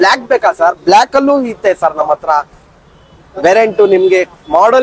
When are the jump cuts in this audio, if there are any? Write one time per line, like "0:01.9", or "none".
none